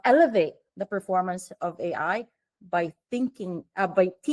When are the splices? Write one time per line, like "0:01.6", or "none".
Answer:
none